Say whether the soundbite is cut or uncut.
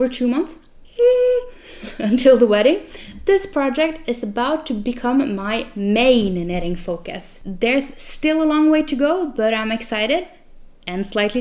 uncut